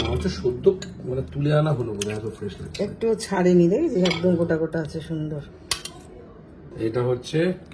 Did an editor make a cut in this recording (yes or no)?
yes